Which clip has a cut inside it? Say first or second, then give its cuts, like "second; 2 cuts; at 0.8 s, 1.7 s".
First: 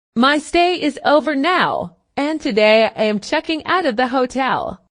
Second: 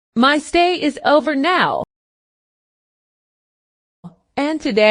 first; 1 cut; at 2.0 s